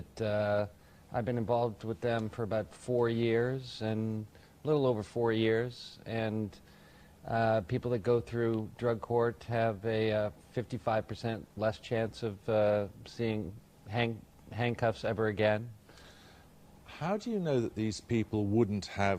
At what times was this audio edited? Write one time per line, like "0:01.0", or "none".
0:15.9